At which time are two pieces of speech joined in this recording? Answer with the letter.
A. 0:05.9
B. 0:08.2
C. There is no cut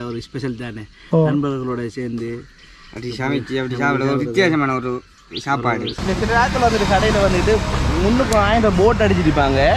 A